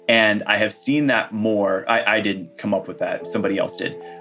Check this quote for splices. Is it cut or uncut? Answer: cut